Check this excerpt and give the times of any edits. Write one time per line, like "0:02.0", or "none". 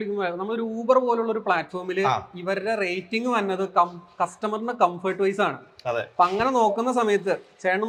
none